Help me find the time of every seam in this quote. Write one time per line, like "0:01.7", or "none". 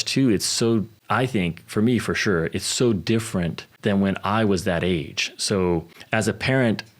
0:01.0
0:03.6
0:06.0